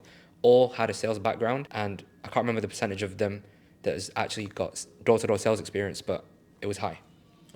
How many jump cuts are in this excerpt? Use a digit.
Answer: 1